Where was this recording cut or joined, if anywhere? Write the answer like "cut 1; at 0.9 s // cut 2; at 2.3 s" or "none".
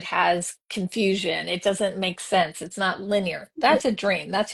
none